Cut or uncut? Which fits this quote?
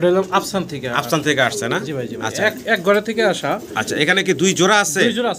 uncut